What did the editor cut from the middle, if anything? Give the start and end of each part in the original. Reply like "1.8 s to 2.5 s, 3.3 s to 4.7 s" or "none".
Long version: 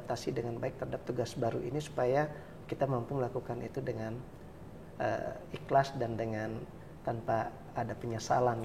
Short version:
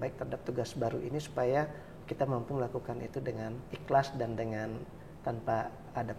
4.3 s to 5.5 s